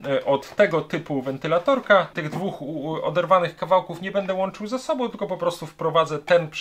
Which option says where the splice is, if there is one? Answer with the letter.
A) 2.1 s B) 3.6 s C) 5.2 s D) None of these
A